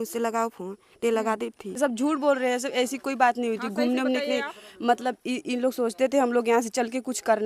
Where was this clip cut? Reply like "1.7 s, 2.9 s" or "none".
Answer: 1.8 s